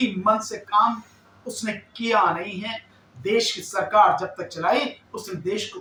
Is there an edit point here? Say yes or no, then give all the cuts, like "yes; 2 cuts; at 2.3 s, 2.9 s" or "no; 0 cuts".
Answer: no; 0 cuts